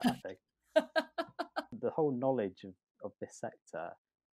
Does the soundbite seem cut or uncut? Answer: cut